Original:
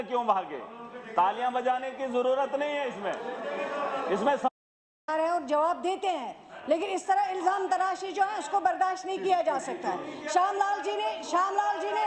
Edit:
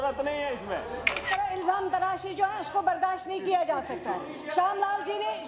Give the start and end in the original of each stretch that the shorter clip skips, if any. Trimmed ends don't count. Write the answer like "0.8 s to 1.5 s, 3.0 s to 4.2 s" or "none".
3.6 s to 7.0 s